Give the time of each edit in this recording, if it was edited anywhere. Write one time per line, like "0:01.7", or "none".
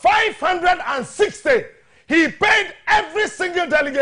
none